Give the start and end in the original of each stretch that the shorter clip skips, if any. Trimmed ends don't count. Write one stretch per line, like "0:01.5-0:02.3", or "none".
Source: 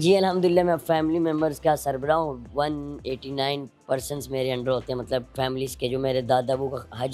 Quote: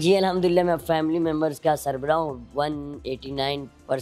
none